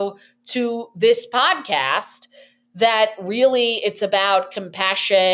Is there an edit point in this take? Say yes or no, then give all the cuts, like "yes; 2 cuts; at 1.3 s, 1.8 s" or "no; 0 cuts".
no; 0 cuts